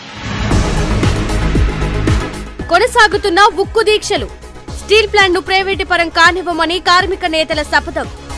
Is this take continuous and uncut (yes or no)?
yes